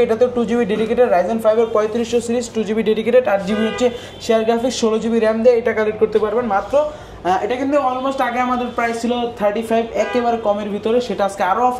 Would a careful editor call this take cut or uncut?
uncut